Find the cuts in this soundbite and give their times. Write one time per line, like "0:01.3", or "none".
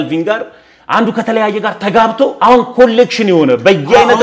0:02.3